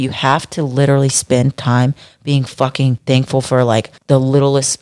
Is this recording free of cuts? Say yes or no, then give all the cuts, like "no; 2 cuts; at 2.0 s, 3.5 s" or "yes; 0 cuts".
no; 2 cuts; at 3.0 s, 3.9 s